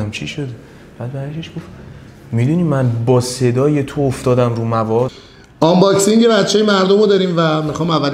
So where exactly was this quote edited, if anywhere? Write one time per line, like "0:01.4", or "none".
0:05.2